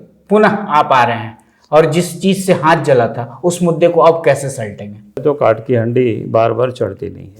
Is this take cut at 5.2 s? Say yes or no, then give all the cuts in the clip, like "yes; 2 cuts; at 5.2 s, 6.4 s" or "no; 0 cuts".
yes; 1 cut; at 5.2 s